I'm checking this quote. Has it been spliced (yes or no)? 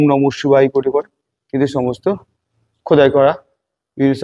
no